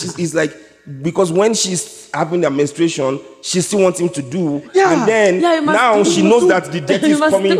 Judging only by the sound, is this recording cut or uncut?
uncut